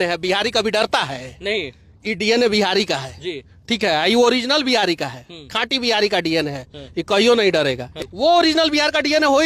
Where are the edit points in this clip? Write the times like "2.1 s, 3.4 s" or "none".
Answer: 7.9 s